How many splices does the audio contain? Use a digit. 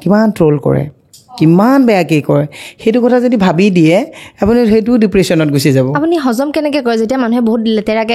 0